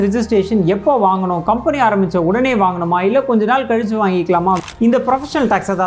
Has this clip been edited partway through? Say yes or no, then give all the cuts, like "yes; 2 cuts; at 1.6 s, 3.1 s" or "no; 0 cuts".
yes; 1 cut; at 4.6 s